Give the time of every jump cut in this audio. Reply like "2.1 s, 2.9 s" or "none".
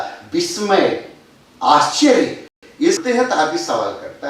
2.7 s